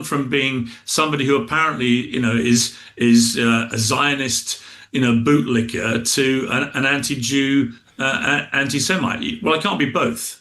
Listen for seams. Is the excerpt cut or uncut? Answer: uncut